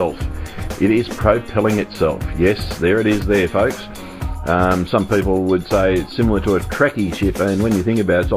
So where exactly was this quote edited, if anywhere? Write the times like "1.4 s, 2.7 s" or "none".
4.2 s